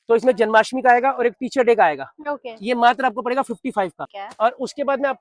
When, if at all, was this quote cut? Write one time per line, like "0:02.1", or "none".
none